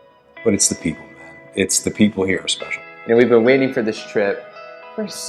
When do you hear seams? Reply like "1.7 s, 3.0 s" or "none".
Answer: 2.9 s